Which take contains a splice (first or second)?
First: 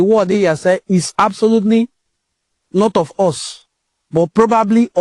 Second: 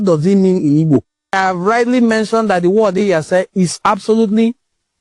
second